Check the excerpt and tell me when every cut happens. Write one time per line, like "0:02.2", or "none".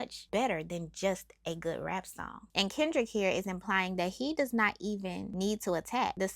0:02.4